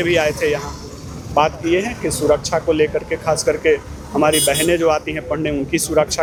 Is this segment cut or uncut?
uncut